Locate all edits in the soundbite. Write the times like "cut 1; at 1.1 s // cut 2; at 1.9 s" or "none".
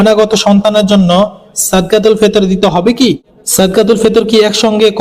cut 1; at 3.3 s